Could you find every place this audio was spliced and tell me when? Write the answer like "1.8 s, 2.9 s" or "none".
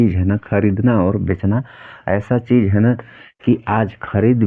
none